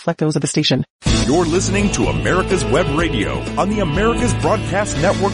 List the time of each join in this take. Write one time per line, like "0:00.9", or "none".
0:01.0

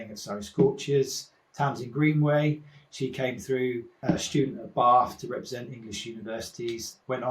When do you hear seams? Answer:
0:04.0

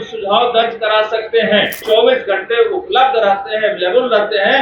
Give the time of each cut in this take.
0:01.8

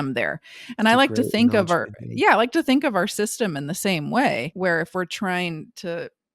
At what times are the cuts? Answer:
0:04.5

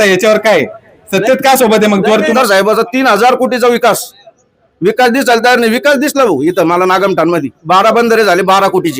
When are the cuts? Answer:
0:02.3

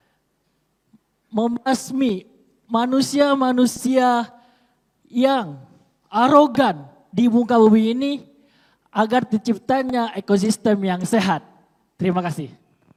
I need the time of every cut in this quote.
none

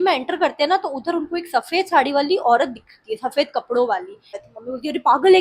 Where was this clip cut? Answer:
0:04.4

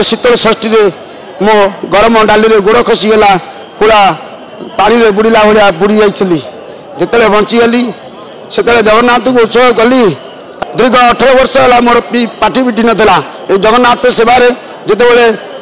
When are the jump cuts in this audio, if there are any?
0:10.5

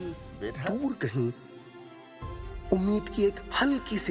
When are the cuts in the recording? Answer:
none

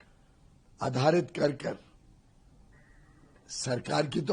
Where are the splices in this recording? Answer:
none

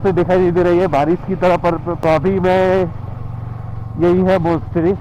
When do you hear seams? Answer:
0:01.9

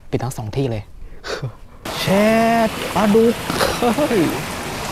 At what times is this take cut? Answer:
0:01.8

